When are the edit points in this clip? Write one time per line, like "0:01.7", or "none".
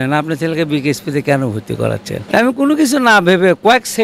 0:02.2

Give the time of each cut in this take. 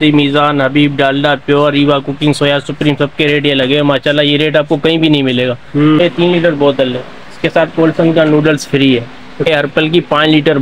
0:06.0
0:09.5

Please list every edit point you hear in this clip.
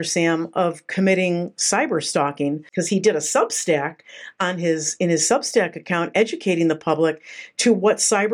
0:02.7

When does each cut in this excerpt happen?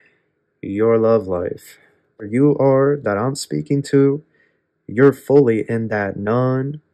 0:02.2

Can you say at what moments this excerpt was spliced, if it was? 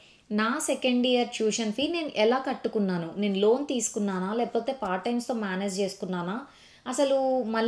none

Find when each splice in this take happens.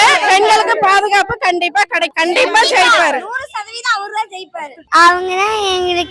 0:02.1
0:04.8

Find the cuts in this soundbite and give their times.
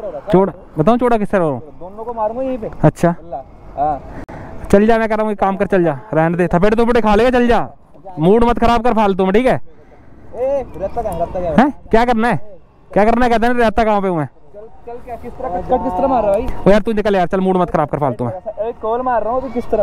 none

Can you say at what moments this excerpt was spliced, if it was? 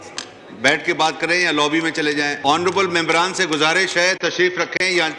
0:02.3

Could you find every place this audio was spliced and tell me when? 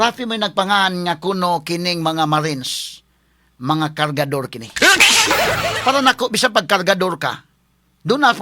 0:05.7

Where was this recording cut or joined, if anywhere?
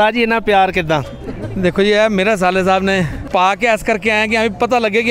0:03.2

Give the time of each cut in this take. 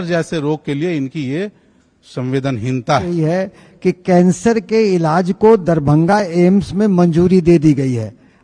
0:03.2

